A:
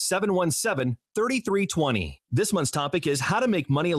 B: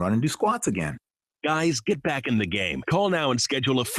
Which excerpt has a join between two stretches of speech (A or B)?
A